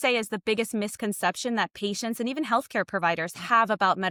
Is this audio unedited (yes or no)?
yes